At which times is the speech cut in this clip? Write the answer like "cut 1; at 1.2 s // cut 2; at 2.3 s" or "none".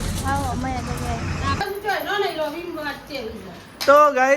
cut 1; at 1.6 s